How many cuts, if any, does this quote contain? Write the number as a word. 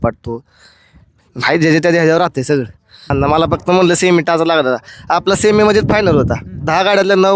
one